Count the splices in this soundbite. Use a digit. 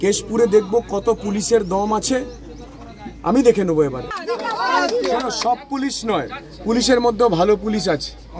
1